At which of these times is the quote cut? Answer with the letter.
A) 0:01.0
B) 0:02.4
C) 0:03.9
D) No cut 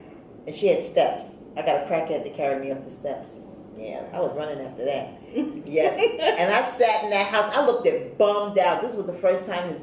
C